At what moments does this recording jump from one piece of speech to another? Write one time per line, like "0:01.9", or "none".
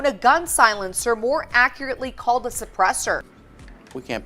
0:03.3

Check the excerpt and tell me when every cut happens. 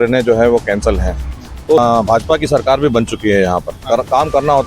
0:01.8

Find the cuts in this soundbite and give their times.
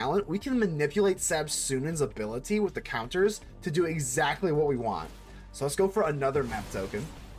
none

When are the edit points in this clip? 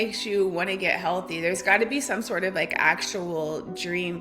none

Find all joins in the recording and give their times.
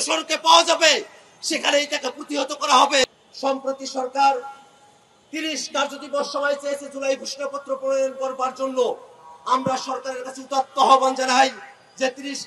0:03.0

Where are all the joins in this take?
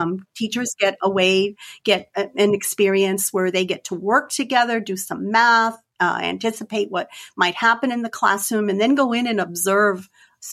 none

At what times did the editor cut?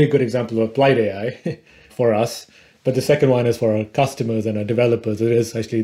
none

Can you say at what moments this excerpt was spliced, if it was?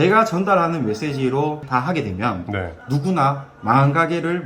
none

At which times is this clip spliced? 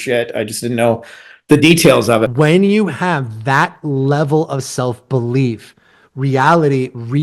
0:02.3

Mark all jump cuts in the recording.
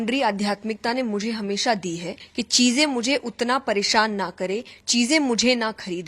0:02.2

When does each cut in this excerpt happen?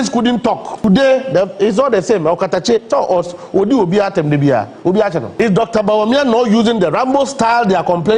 0:00.8
0:05.3

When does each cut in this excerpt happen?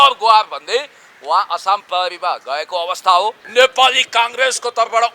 0:03.4

